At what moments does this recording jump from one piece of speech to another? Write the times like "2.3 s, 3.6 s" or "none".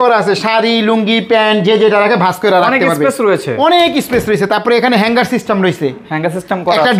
none